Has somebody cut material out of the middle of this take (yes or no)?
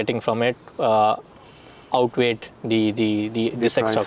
no